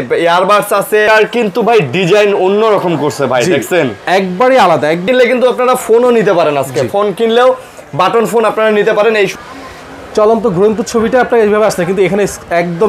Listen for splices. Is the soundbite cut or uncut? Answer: cut